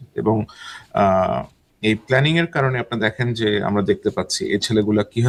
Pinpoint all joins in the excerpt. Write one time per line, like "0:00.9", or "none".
none